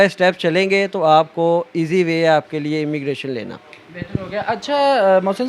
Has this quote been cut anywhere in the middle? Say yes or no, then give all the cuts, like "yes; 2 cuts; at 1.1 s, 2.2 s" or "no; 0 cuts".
no; 0 cuts